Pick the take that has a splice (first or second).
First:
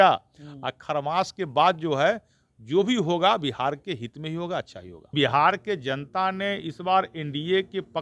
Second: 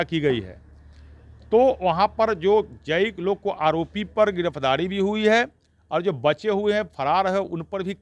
first